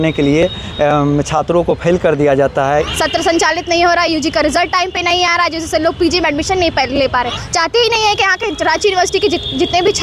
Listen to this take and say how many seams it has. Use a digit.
2